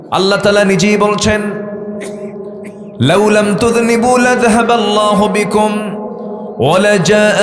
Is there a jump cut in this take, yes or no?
no